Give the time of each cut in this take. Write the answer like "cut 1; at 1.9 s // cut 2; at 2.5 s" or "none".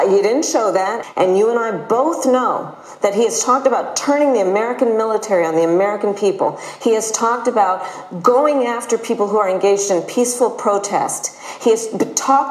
cut 1; at 1.0 s